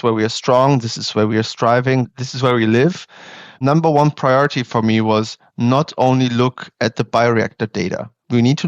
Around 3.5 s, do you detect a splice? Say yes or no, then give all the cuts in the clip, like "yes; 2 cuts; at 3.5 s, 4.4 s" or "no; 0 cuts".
yes; 1 cut; at 3.5 s